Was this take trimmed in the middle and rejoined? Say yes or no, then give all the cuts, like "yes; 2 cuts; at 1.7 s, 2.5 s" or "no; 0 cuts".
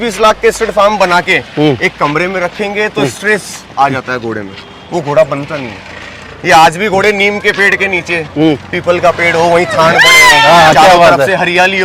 no; 0 cuts